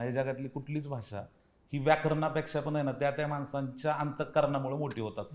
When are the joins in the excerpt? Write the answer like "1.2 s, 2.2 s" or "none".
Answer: none